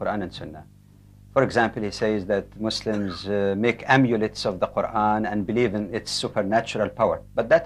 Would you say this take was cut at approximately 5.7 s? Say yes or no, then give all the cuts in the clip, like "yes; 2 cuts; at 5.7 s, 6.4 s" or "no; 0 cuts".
no; 1 cut; at 1.5 s